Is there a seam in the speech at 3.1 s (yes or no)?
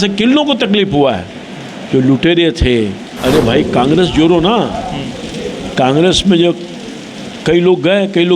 yes